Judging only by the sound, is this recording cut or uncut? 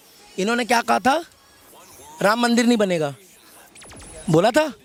uncut